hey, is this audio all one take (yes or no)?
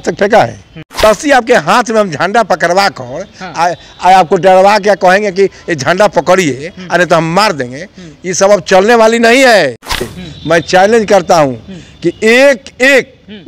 no